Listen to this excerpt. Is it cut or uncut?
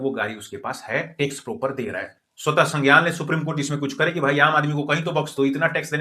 cut